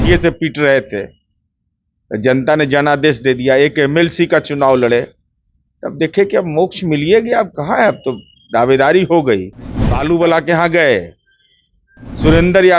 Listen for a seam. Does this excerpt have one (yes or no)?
yes